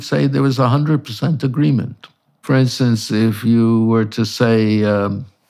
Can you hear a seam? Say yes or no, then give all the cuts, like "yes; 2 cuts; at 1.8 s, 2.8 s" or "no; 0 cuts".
yes; 1 cut; at 2.4 s